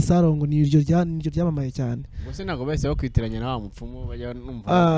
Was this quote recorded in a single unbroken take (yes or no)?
yes